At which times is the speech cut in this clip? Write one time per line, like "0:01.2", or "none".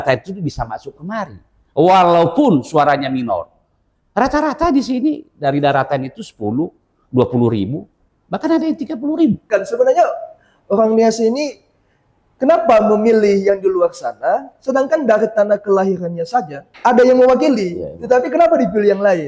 0:09.4
0:16.6